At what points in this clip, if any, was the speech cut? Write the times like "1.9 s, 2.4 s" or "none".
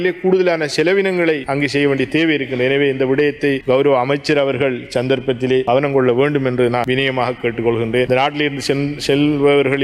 none